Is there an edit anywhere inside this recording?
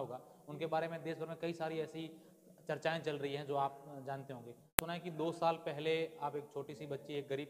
yes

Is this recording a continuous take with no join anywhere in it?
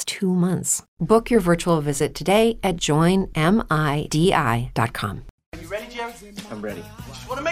no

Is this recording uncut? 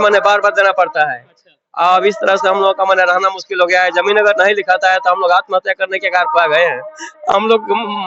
yes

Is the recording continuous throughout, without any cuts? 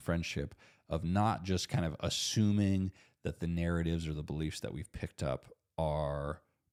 yes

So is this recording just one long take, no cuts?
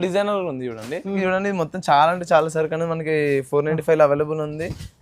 no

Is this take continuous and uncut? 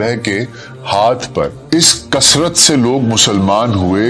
no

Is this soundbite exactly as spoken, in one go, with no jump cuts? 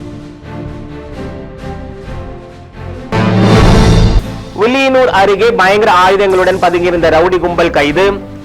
no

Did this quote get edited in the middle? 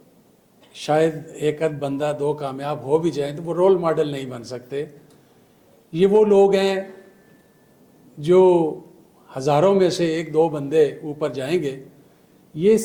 no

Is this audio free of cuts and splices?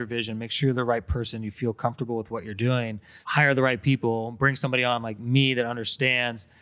no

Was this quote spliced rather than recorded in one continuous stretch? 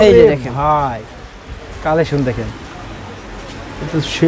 no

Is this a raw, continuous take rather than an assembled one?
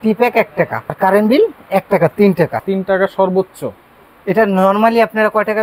no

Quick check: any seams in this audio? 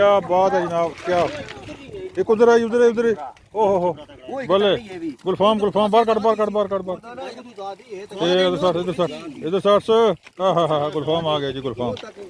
no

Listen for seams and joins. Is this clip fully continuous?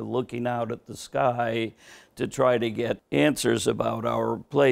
no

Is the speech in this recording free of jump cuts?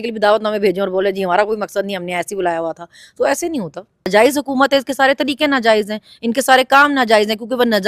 no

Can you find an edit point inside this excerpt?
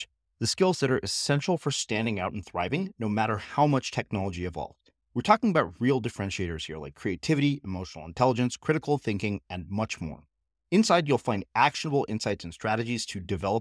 no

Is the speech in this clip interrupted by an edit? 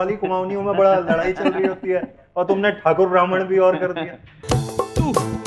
yes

